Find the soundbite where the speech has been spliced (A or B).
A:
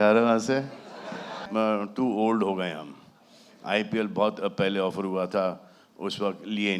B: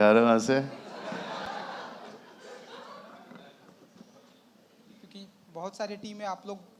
A